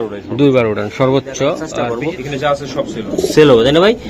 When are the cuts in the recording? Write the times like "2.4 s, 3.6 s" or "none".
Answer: 1.7 s